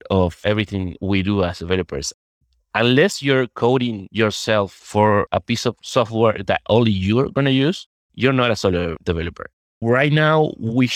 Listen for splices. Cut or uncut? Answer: cut